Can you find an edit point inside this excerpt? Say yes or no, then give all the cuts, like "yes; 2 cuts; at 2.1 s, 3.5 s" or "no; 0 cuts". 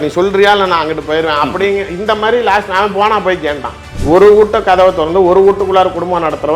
yes; 1 cut; at 3.9 s